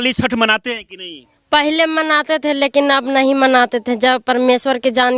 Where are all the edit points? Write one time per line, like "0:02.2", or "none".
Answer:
none